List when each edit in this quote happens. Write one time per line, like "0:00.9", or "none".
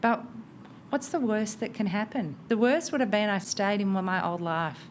0:02.4
0:03.5